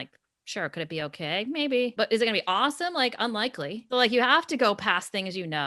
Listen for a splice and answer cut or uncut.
cut